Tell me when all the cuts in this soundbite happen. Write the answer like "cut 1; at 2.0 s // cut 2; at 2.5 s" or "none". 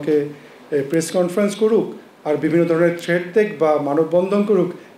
none